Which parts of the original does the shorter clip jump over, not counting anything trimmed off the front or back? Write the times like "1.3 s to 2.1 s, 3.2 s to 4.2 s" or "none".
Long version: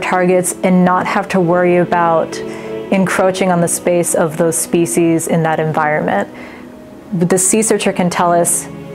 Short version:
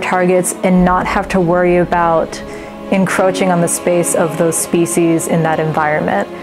none